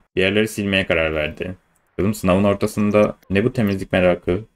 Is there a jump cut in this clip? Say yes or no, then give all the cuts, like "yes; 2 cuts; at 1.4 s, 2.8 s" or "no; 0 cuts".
no; 0 cuts